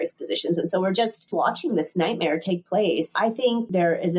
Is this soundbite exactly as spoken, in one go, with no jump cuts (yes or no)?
no